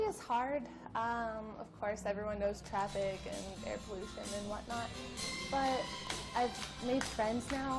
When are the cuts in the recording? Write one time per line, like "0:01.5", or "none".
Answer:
0:04.2